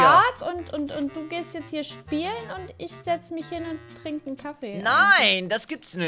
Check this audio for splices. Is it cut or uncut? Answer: uncut